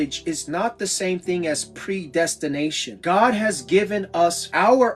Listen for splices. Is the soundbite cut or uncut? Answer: cut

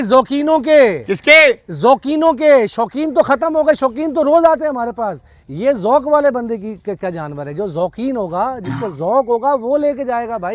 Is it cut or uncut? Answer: uncut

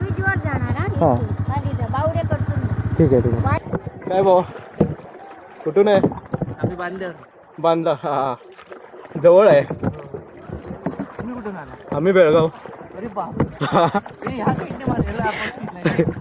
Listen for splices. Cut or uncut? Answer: cut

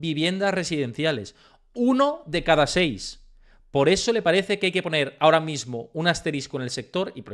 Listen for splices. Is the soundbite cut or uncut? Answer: uncut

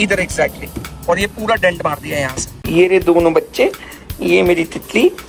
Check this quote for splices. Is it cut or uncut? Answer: cut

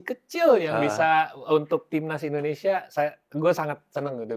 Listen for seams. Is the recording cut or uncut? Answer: uncut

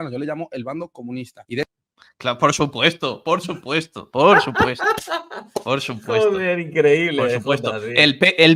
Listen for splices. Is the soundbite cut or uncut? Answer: uncut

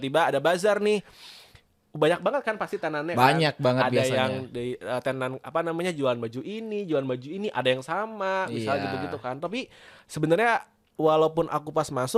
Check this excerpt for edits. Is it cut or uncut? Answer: uncut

